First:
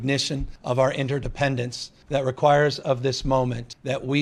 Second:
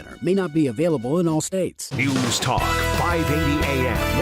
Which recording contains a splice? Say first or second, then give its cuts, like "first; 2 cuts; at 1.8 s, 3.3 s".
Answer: second; 1 cut; at 1.9 s